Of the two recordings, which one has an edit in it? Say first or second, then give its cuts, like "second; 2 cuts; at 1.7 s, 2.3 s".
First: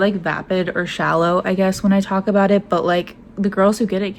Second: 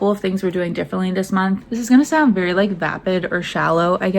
second; 1 cut; at 1.6 s